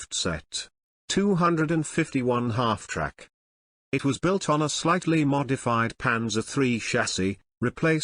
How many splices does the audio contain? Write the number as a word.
one